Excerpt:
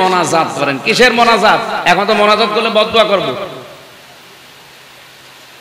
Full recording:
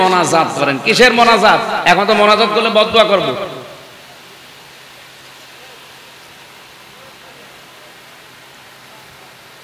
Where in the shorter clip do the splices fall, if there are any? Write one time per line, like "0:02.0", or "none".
none